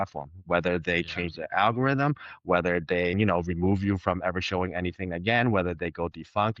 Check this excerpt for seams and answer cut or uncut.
cut